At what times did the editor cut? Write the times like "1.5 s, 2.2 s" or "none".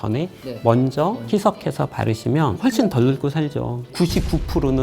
2.6 s, 3.9 s

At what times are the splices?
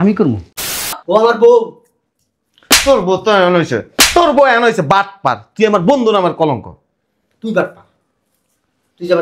1.0 s

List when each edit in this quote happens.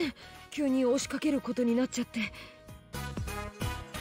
2.9 s

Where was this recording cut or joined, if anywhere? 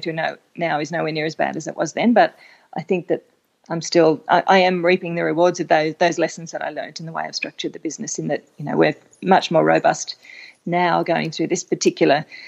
none

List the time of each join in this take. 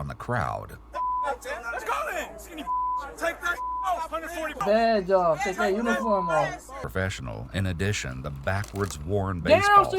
4.6 s, 6.8 s

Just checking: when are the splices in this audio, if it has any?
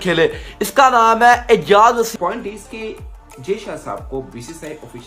2.1 s

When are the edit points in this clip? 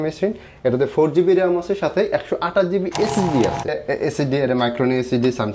3.8 s

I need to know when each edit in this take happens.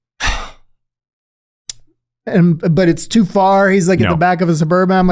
none

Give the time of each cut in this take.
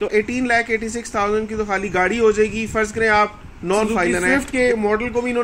4.5 s

